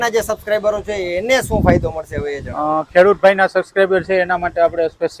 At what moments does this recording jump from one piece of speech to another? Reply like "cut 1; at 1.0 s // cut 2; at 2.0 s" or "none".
none